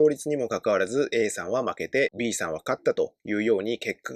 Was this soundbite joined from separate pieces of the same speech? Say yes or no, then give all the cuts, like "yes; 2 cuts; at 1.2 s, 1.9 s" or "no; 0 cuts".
no; 0 cuts